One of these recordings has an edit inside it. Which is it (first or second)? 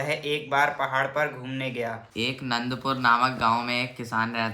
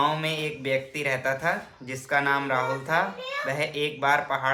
first